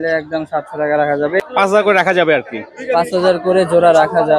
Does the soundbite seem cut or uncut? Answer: cut